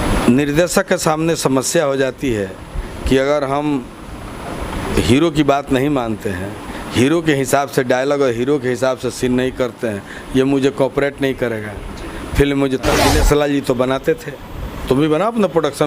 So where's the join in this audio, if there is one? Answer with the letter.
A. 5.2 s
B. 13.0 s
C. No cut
B